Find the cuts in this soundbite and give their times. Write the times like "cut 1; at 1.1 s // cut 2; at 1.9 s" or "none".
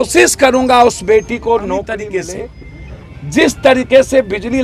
cut 1; at 2.2 s